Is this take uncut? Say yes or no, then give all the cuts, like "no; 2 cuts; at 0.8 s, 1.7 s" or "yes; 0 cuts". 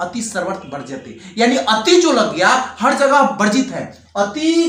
yes; 0 cuts